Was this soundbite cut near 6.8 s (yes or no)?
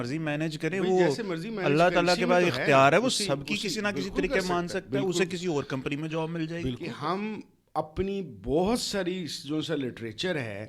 yes